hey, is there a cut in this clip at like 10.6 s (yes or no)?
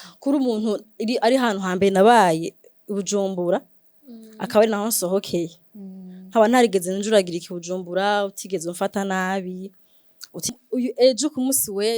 yes